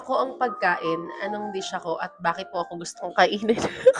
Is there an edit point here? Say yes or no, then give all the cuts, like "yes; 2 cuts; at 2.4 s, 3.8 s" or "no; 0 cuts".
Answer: no; 0 cuts